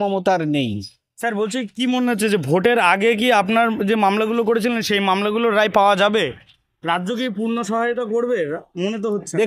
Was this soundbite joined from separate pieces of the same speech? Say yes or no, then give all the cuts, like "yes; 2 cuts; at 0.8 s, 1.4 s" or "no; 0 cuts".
no; 0 cuts